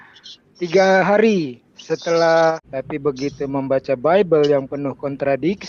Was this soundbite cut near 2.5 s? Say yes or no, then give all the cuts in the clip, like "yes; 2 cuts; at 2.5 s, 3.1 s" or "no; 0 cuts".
yes; 1 cut; at 2.5 s